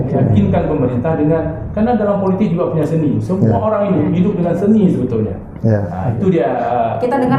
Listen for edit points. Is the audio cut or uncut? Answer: uncut